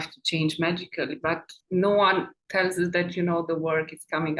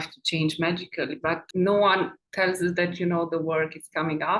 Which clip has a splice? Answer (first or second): second